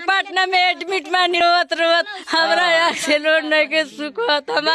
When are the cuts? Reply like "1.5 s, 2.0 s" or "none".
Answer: 1.4 s